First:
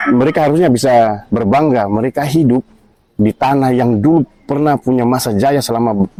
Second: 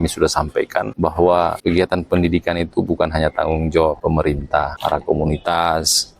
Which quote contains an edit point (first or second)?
second